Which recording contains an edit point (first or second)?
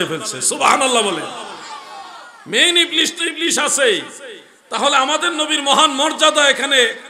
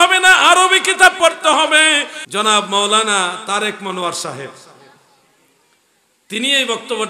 second